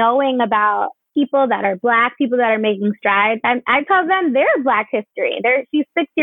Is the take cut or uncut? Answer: cut